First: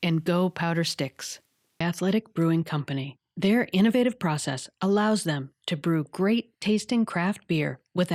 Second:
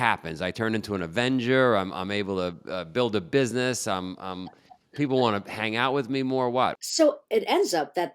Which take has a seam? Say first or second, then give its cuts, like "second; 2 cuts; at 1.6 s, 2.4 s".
second; 1 cut; at 6.8 s